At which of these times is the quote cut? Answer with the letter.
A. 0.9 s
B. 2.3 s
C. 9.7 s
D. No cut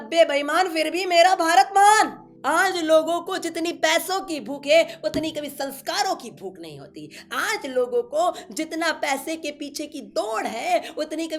B